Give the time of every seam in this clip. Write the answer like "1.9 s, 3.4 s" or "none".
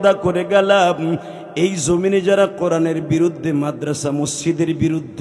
none